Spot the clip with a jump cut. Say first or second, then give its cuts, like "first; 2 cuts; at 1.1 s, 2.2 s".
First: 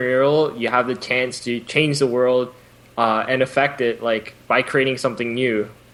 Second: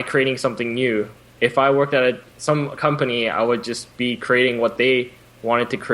second; 1 cut; at 2.3 s